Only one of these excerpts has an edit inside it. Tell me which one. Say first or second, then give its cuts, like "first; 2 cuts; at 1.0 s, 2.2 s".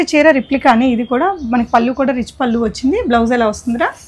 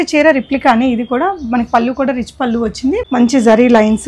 second; 1 cut; at 3.0 s